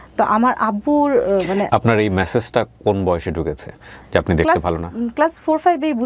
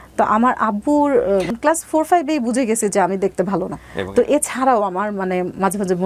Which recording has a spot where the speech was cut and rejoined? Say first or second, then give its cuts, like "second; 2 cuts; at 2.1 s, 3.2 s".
second; 2 cuts; at 1.5 s, 3.8 s